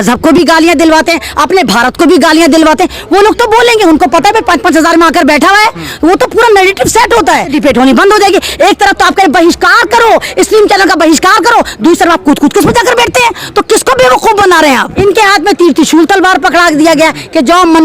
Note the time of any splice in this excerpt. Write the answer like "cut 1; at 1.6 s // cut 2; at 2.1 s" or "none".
cut 1; at 7.5 s // cut 2; at 14.9 s